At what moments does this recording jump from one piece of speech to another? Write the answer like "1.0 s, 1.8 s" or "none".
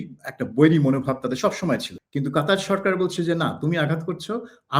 1.9 s